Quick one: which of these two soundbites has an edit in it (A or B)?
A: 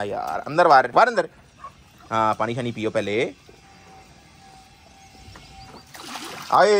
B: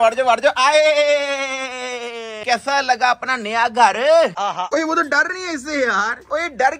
B